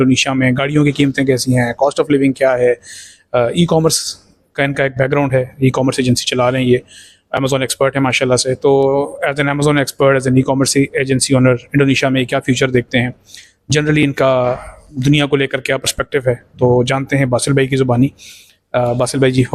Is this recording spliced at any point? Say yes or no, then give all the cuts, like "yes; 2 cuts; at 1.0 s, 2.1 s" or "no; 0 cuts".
no; 0 cuts